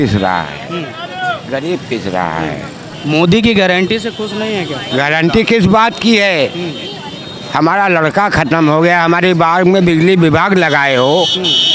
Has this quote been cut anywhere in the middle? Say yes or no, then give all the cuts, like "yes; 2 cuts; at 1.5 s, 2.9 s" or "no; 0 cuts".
no; 0 cuts